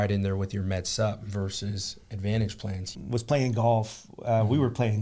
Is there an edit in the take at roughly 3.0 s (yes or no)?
yes